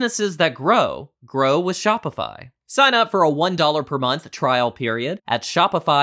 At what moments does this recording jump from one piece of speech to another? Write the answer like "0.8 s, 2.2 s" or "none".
none